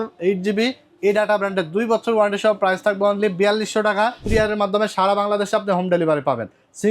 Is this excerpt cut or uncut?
cut